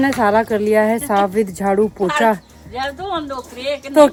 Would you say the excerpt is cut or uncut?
uncut